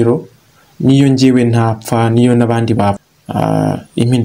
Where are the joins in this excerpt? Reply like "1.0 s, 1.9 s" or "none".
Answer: 3.0 s